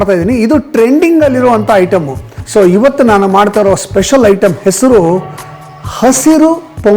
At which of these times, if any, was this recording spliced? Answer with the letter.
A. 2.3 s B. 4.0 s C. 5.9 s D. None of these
A